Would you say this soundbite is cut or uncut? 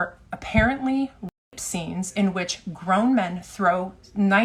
uncut